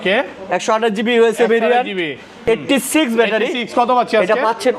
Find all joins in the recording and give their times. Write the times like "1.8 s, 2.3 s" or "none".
2.4 s